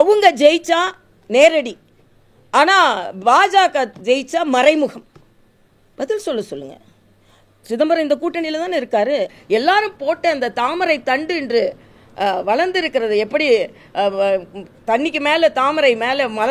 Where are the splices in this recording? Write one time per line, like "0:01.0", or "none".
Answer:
0:09.4